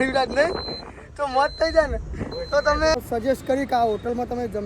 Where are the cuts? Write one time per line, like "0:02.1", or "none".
0:02.9